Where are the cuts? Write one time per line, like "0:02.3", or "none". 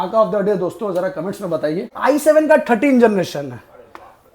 0:01.9